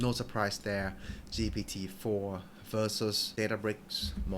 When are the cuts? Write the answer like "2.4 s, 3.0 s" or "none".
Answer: 3.3 s